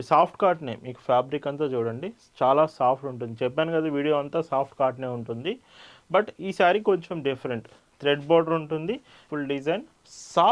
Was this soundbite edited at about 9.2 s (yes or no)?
yes